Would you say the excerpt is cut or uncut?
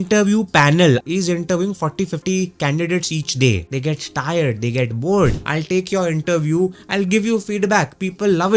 cut